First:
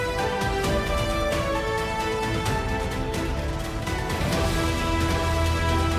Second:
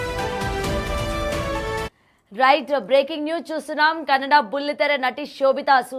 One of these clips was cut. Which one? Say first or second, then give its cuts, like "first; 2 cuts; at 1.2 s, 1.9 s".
second; 1 cut; at 1.8 s